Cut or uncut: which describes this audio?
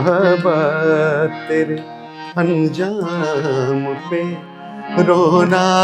uncut